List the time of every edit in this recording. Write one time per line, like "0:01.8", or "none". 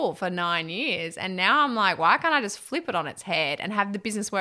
none